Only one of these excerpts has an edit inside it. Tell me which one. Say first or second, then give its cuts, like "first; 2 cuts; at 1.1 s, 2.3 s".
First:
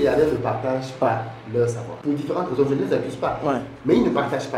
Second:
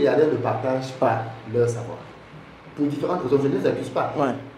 first; 1 cut; at 1.9 s